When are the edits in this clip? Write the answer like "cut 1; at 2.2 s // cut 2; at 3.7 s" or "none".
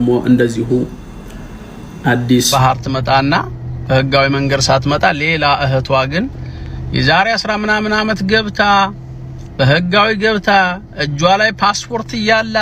cut 1; at 2.5 s